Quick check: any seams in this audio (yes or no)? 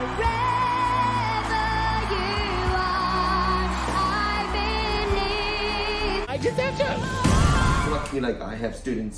no